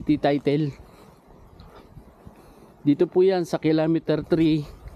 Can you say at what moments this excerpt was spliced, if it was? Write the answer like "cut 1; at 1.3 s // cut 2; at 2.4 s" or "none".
none